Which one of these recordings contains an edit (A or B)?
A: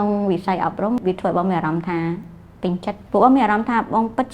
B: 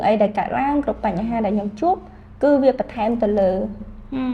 A